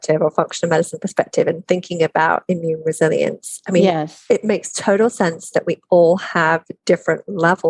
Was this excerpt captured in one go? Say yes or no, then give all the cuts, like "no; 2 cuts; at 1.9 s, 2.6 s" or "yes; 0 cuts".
yes; 0 cuts